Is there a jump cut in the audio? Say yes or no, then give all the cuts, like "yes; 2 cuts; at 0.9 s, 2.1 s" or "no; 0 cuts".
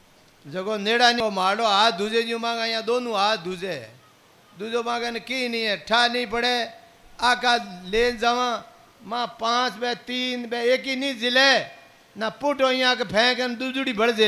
yes; 1 cut; at 1.2 s